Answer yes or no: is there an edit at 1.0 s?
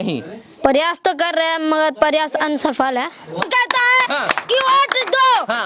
no